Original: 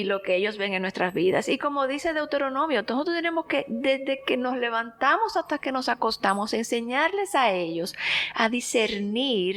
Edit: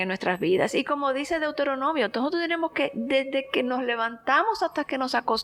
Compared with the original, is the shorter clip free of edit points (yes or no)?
yes